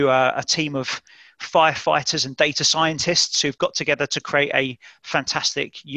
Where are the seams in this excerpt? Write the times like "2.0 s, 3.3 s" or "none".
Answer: none